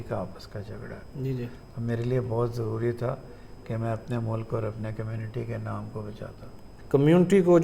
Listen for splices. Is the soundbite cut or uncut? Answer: cut